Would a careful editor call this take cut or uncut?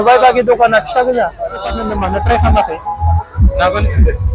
cut